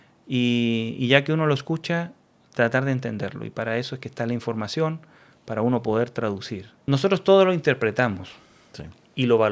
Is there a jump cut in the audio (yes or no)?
yes